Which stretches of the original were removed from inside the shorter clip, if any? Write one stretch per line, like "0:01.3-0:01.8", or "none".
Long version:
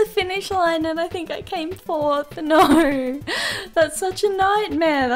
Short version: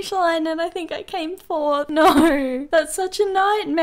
0:02.3-0:02.4
0:03.2-0:03.7